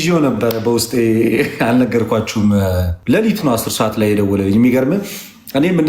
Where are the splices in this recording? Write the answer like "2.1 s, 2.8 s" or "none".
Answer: 2.9 s